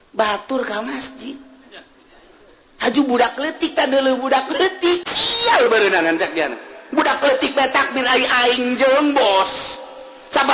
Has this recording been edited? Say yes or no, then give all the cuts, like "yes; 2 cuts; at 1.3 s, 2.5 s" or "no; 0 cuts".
yes; 1 cut; at 5.1 s